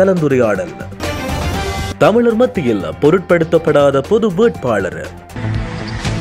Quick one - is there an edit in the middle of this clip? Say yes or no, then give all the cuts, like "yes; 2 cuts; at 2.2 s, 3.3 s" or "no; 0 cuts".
yes; 1 cut; at 5.2 s